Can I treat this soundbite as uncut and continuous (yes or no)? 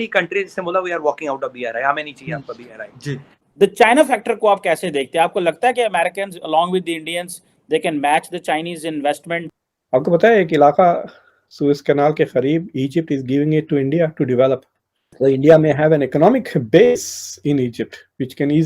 no